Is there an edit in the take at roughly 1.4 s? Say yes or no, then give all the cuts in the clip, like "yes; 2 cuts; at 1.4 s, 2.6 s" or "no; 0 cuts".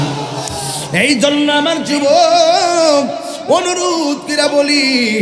no; 0 cuts